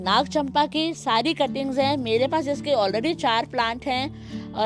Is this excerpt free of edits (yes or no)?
yes